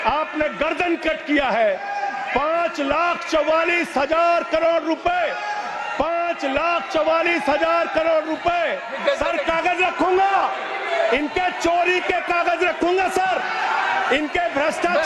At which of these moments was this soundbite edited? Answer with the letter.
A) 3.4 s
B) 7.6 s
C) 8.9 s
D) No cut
C